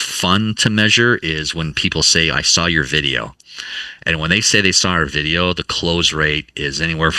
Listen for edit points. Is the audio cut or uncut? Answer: uncut